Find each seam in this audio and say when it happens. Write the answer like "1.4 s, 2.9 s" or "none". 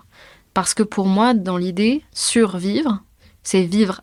none